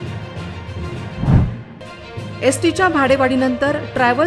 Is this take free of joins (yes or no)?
no